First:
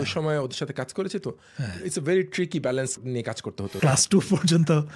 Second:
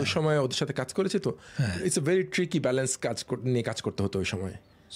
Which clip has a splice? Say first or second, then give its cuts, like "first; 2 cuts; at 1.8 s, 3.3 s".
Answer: first; 1 cut; at 3.4 s